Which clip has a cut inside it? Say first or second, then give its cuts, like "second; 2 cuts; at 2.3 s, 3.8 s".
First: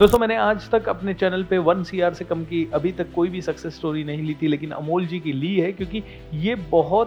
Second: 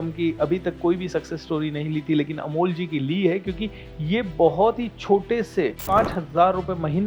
second; 1 cut; at 5.8 s